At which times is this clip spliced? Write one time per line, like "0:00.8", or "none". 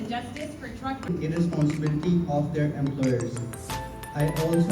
0:01.1